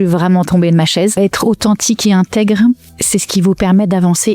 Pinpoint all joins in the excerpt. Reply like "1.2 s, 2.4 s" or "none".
1.1 s, 2.9 s